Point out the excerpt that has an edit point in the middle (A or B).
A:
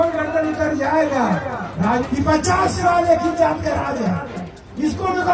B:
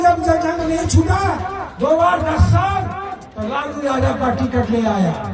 A